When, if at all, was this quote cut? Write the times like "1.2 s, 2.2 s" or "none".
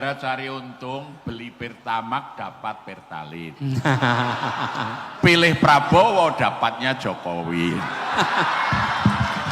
none